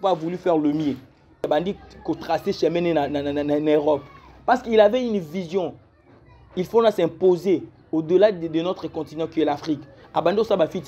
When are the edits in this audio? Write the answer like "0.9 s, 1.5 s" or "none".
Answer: 1.5 s